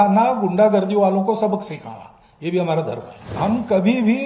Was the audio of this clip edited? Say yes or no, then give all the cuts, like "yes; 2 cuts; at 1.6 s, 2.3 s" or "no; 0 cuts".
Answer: yes; 1 cut; at 3.3 s